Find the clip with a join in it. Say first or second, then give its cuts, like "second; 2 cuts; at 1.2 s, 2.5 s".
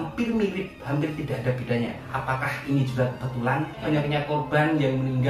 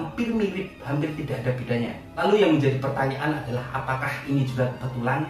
first; 2 cuts; at 2.1 s, 3.8 s